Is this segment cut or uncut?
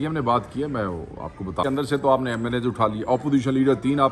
cut